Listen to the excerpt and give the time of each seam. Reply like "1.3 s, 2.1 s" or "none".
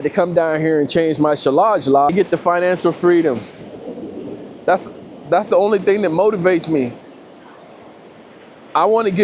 2.1 s